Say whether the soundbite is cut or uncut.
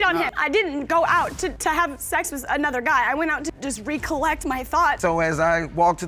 cut